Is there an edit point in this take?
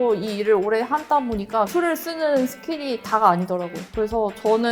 yes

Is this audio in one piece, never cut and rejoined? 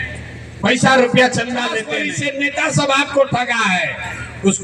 no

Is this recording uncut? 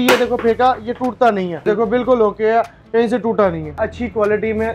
no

